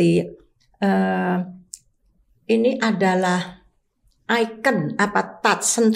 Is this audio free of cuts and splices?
yes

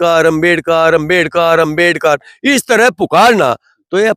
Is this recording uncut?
yes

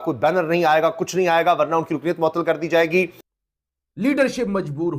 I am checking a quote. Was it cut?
yes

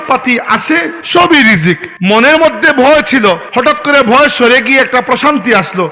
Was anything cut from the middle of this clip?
yes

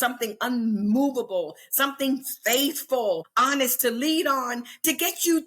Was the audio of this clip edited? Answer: yes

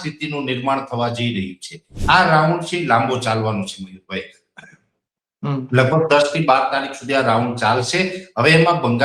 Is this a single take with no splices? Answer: no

